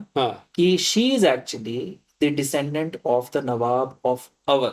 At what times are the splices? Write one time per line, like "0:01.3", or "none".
none